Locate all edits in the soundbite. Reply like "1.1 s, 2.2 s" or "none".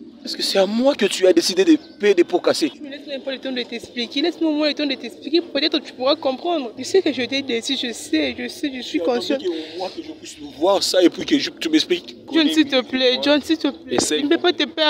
2.8 s, 6.8 s, 12.3 s